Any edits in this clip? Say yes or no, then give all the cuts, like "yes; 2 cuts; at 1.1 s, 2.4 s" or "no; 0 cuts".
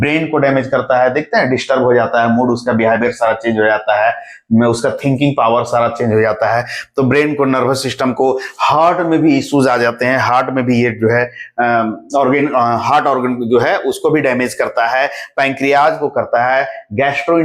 no; 0 cuts